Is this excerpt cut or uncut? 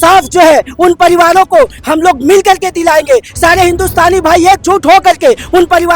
uncut